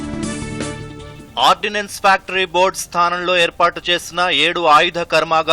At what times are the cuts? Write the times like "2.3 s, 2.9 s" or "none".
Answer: 1.2 s